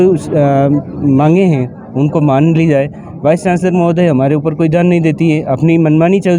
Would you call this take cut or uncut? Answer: uncut